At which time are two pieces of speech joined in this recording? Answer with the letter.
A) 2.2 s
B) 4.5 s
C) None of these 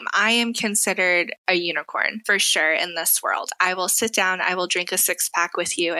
A